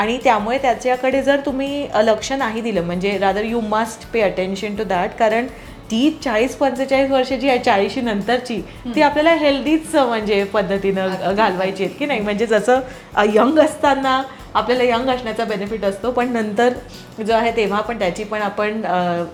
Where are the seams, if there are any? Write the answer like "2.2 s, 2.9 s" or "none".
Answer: none